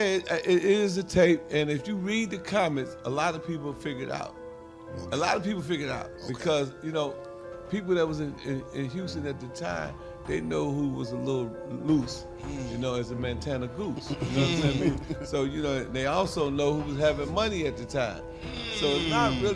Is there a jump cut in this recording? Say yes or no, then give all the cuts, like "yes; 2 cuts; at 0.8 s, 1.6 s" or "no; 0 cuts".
no; 0 cuts